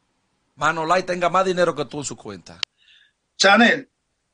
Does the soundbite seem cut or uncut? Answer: cut